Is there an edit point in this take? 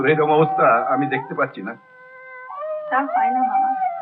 no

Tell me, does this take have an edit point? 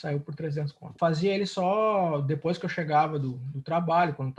yes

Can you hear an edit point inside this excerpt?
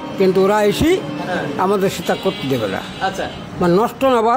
no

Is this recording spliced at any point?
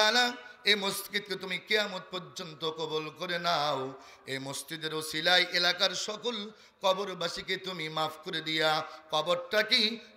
no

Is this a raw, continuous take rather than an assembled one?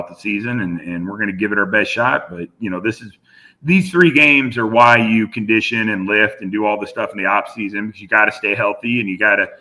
yes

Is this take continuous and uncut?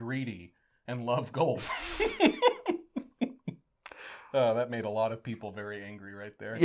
yes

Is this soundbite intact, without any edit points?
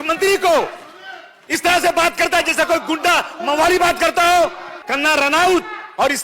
no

